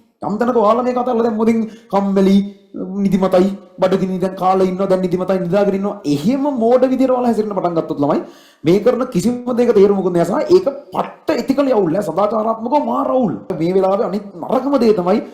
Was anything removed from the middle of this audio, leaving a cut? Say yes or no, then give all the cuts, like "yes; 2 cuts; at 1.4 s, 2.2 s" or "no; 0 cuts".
yes; 1 cut; at 13.6 s